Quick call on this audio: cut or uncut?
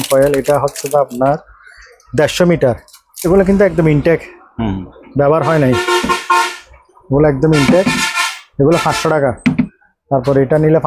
cut